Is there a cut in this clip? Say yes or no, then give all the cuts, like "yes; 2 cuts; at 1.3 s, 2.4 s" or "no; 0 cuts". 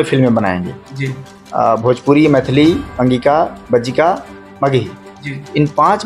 no; 0 cuts